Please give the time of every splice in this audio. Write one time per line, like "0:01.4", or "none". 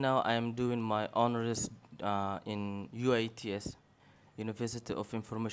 none